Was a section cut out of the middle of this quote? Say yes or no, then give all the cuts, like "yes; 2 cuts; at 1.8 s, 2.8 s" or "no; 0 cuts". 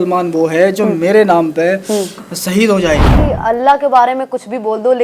yes; 1 cut; at 3.1 s